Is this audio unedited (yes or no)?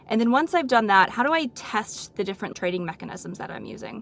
no